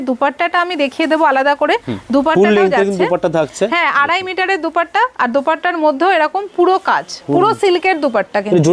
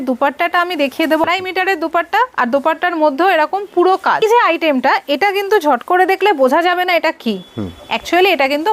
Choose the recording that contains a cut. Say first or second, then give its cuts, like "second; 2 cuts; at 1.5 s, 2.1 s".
second; 2 cuts; at 1.2 s, 4.2 s